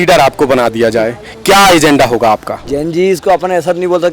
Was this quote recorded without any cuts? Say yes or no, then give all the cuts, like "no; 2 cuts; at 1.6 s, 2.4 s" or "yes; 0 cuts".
no; 1 cut; at 2.6 s